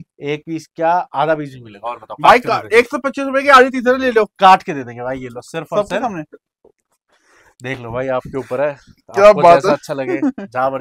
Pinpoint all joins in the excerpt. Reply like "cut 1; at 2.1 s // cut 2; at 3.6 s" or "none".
none

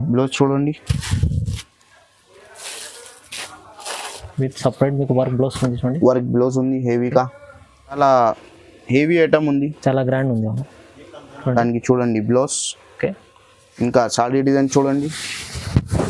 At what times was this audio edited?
cut 1; at 8.0 s

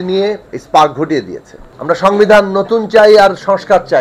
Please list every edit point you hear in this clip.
cut 1; at 1.7 s

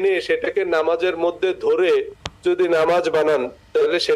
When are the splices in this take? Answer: cut 1; at 3.2 s

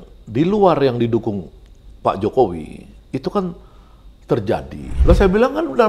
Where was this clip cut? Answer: cut 1; at 4.8 s

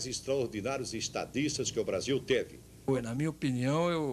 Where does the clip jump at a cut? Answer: cut 1; at 2.9 s

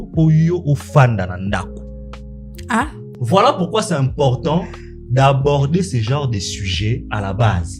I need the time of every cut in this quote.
cut 1; at 3.0 s

